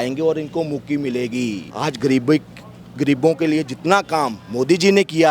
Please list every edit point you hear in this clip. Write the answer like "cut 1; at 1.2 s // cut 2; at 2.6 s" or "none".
cut 1; at 1.6 s